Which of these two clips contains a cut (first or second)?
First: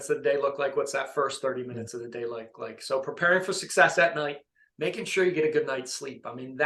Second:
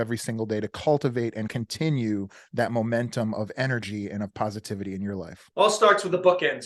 second